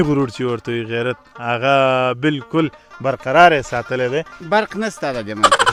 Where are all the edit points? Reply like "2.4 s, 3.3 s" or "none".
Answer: none